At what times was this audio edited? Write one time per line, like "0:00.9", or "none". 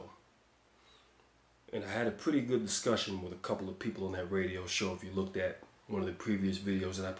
none